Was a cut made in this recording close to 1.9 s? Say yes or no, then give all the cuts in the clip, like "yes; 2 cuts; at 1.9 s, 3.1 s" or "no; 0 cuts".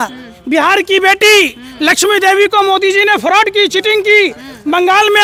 no; 0 cuts